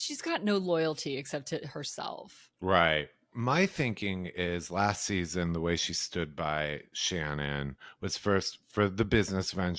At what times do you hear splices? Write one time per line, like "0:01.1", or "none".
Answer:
0:03.3